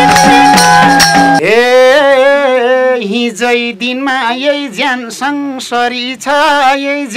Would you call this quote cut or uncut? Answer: cut